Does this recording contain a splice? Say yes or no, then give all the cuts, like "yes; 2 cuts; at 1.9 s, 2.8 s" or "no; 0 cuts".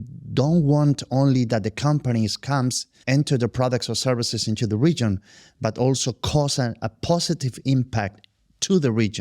yes; 1 cut; at 2.9 s